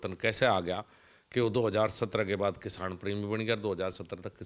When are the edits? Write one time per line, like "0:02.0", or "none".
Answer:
none